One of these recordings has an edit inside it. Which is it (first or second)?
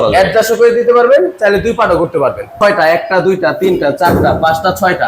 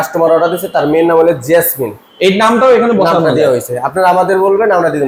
first